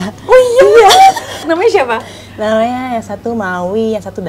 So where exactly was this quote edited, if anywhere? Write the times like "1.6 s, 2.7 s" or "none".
1.4 s